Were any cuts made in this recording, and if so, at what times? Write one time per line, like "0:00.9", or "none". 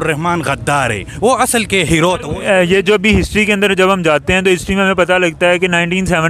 0:02.3